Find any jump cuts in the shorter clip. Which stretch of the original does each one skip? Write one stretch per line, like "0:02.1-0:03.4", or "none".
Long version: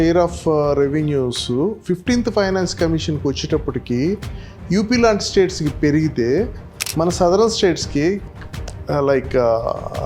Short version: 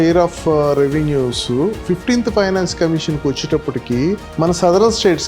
0:04.3-0:06.8